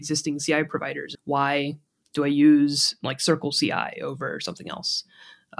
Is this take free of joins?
no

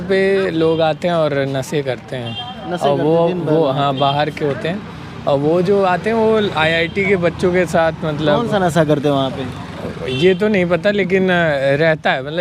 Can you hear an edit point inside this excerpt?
no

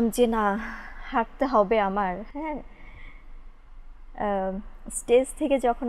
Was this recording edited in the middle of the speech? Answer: no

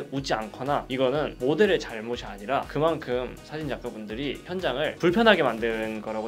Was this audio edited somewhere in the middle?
yes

